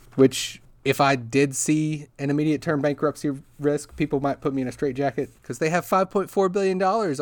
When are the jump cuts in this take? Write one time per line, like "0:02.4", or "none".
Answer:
0:05.4